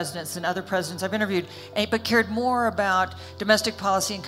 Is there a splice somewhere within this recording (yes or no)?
no